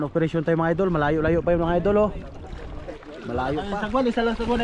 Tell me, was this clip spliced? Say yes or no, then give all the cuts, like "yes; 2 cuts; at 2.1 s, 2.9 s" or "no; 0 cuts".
yes; 1 cut; at 3.7 s